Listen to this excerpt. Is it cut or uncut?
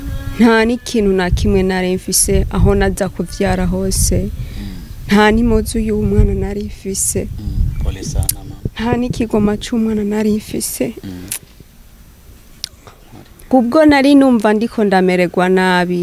cut